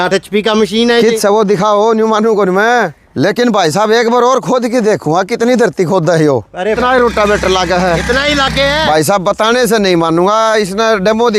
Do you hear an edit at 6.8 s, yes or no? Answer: yes